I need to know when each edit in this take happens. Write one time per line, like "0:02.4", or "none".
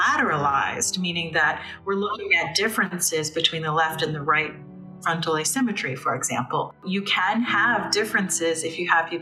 0:06.8